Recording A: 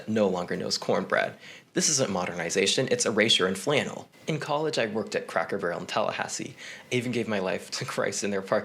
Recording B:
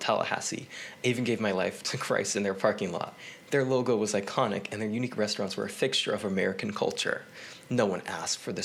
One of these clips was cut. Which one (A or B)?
A